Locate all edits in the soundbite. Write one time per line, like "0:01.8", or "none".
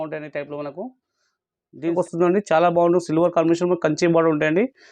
0:01.9